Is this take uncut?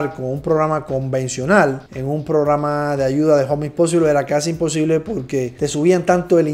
yes; 0 cuts

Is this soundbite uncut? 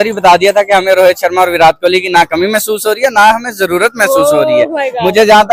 yes; 0 cuts

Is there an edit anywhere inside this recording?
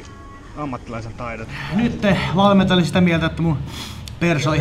yes; 1 cut; at 1.5 s

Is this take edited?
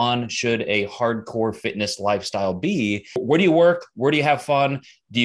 yes; 1 cut; at 3.1 s

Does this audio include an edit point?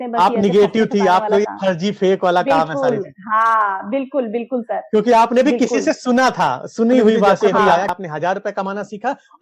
yes; 1 cut; at 7.9 s

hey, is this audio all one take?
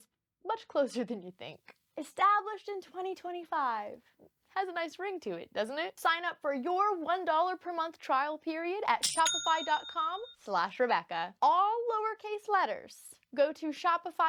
yes; 0 cuts

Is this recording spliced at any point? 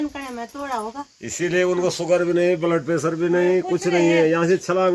no; 0 cuts

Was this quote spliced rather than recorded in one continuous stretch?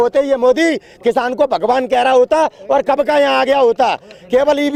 no; 0 cuts

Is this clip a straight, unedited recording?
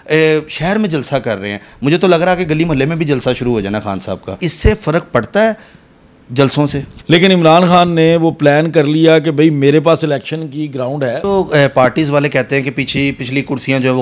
no; 3 cuts; at 4.5 s, 6.9 s, 11.2 s

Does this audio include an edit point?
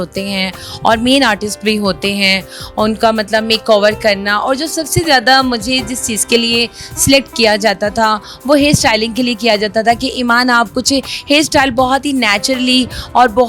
no; 0 cuts

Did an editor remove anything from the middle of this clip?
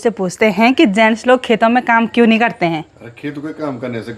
no; 0 cuts

